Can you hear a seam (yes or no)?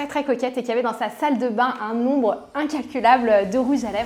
no